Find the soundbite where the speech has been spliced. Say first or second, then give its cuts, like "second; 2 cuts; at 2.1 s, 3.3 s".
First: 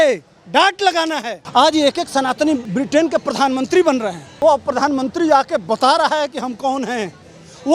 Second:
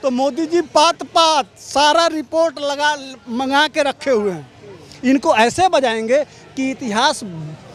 first; 3 cuts; at 1.3 s, 2.7 s, 4.4 s